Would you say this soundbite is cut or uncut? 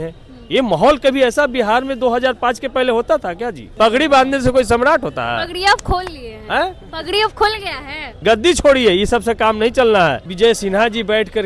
cut